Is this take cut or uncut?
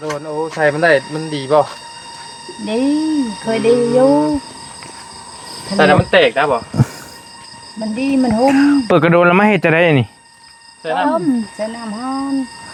uncut